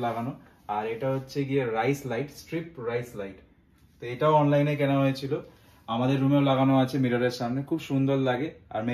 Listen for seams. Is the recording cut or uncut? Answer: uncut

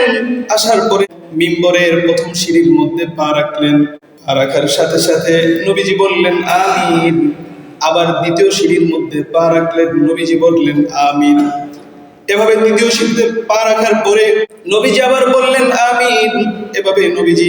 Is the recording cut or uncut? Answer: cut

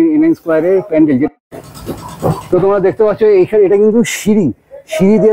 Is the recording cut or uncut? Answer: cut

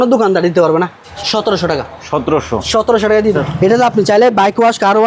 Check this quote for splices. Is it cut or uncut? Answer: cut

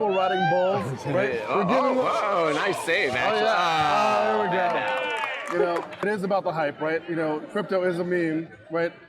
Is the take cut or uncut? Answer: cut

